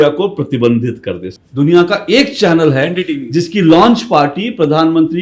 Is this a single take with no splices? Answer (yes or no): no